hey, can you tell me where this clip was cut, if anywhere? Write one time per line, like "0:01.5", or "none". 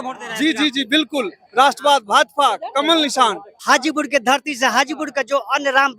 0:03.5